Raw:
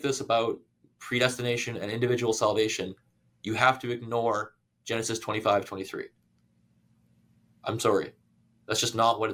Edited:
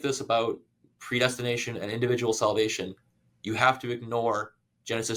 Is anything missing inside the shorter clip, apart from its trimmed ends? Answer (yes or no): no